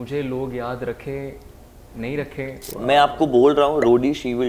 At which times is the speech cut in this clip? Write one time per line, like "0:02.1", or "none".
0:02.6